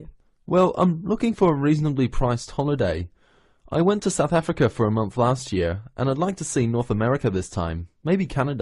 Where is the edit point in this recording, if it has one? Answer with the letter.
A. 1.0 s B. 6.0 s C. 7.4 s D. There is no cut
D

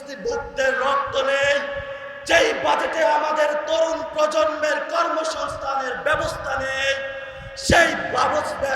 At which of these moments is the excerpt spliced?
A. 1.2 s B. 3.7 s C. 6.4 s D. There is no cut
D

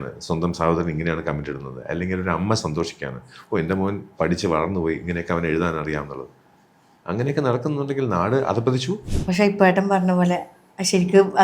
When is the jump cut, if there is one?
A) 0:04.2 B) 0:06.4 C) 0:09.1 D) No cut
C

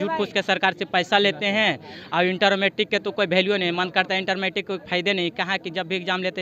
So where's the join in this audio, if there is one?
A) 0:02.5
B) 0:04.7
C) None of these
C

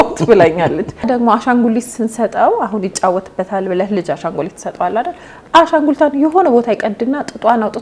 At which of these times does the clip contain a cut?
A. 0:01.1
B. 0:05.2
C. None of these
A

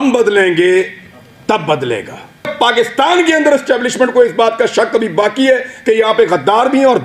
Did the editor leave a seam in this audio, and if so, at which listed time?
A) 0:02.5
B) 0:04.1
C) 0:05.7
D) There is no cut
A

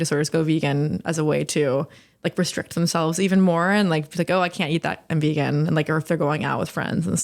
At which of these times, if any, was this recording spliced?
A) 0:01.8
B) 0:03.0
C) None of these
C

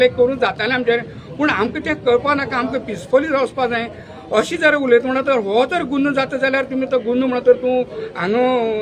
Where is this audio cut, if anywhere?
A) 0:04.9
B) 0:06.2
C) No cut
C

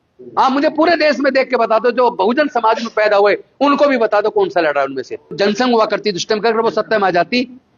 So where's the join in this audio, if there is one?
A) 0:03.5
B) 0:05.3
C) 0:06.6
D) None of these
B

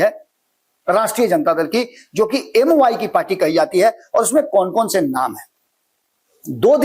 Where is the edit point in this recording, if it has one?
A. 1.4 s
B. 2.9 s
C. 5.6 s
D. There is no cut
D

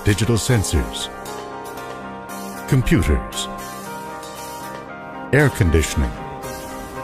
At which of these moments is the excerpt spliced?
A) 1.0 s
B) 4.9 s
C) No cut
B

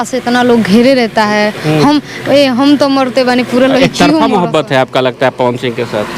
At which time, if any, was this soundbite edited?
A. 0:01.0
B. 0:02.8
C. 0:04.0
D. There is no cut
C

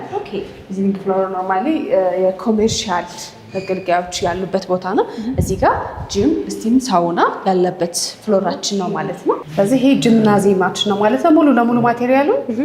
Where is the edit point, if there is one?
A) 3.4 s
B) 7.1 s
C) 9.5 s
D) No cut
C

